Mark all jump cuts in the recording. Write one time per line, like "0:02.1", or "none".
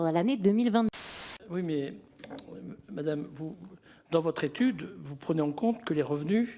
0:00.9